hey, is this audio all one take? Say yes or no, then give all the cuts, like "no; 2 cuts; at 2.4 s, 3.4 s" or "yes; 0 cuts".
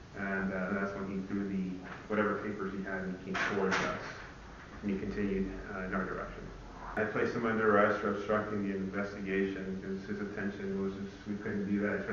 no; 1 cut; at 7.0 s